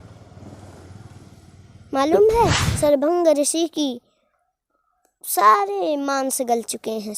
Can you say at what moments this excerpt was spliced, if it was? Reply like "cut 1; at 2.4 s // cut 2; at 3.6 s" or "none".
cut 1; at 2.6 s